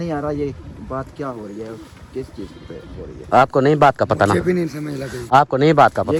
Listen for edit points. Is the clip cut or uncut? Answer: uncut